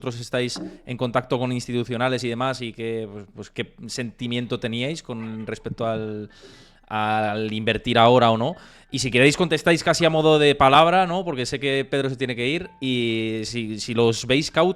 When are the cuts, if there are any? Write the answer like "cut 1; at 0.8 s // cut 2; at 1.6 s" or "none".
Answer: none